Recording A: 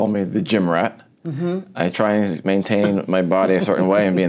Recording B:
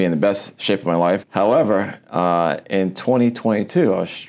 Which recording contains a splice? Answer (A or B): B